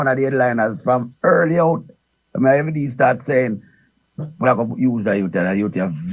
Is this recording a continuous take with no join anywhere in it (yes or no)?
yes